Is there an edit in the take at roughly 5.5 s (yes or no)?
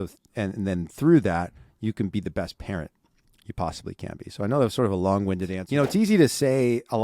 yes